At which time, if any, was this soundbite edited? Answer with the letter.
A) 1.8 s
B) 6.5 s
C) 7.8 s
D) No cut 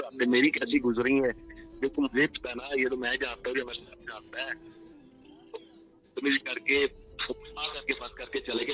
D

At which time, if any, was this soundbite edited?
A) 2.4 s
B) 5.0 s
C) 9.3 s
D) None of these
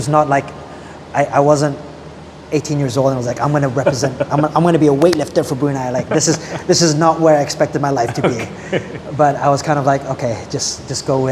D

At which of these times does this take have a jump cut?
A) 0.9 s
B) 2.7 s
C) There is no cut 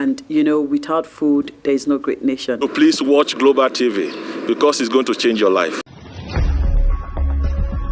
C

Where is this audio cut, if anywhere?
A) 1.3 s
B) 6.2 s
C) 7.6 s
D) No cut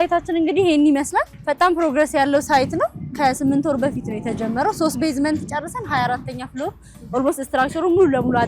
A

